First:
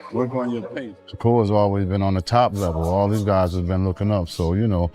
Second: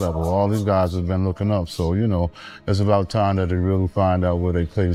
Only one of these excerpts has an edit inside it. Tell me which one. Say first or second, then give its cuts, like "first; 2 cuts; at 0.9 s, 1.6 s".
first; 1 cut; at 1.0 s